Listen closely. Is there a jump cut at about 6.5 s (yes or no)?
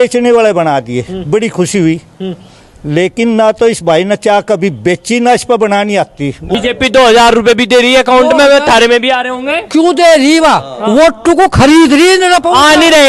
yes